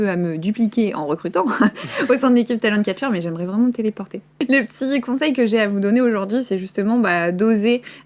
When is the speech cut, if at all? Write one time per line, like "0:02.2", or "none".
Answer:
0:04.3